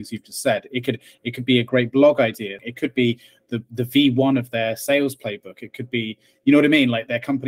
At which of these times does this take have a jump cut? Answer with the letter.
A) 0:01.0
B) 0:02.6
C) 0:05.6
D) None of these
B